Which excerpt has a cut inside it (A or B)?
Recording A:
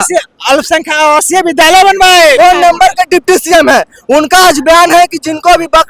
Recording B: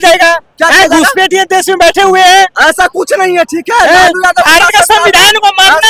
A